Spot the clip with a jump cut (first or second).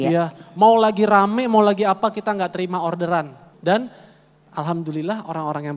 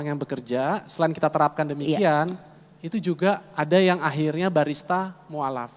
first